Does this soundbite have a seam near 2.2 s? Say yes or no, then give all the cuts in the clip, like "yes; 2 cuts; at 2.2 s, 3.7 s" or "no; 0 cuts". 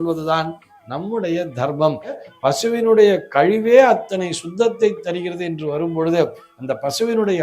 yes; 1 cut; at 2.2 s